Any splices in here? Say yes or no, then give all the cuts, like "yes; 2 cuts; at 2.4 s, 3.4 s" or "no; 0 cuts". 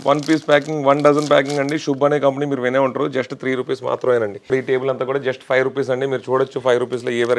yes; 1 cut; at 4.5 s